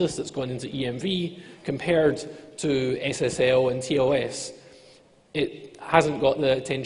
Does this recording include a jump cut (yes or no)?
yes